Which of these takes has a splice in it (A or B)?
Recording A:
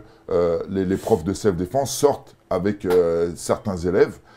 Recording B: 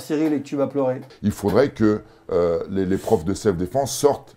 B